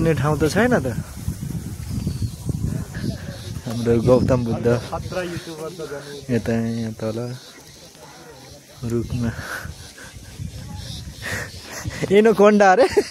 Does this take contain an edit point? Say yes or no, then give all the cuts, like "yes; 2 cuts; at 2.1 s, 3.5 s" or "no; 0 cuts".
yes; 1 cut; at 3.0 s